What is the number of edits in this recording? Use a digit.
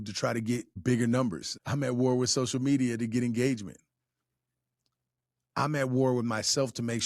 2